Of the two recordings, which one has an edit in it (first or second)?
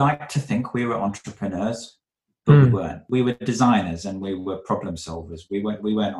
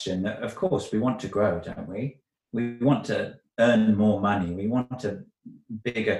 first